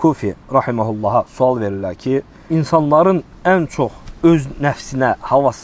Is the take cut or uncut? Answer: cut